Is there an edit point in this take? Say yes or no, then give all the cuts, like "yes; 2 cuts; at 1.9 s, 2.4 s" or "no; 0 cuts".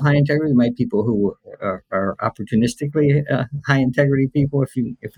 no; 0 cuts